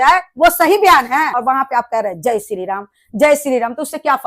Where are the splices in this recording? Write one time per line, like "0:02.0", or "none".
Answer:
0:01.4